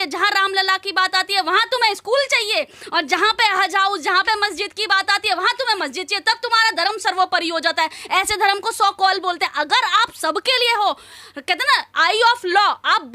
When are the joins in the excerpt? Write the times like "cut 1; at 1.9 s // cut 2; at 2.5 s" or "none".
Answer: none